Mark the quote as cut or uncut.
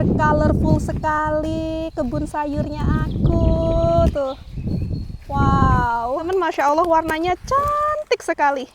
cut